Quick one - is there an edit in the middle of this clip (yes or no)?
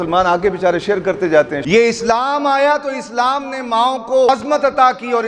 yes